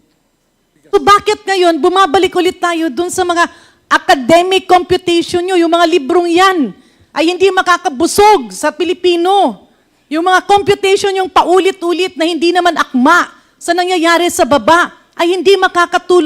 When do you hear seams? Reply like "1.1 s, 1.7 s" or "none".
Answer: 0.9 s